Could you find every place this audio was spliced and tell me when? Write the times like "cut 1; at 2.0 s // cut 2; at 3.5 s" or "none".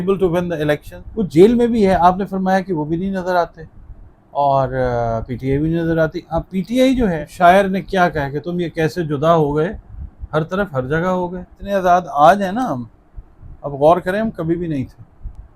cut 1; at 1.0 s // cut 2; at 7.2 s // cut 3; at 11.5 s